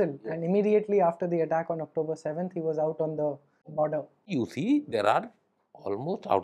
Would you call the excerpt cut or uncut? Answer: cut